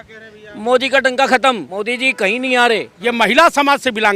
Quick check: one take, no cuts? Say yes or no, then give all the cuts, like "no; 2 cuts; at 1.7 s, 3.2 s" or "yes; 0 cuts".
no; 2 cuts; at 1.7 s, 2.9 s